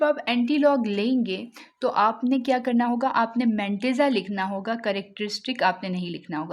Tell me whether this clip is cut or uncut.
uncut